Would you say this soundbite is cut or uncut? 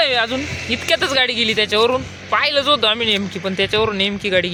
uncut